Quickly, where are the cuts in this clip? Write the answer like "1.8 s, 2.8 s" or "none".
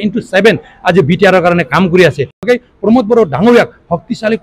2.4 s